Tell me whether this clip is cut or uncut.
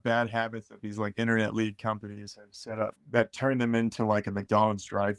cut